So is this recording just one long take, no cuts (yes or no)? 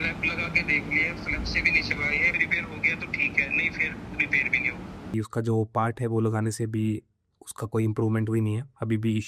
no